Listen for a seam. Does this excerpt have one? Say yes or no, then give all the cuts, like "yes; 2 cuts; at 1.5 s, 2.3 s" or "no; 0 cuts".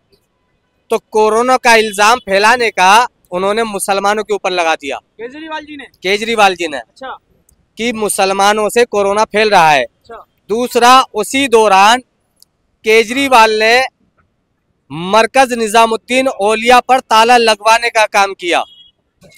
no; 0 cuts